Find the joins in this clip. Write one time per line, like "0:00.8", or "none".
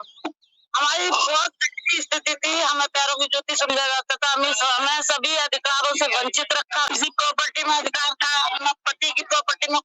0:06.9